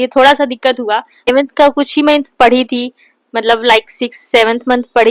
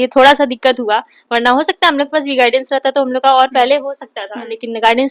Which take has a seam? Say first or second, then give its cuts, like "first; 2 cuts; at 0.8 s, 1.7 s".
first; 1 cut; at 1.3 s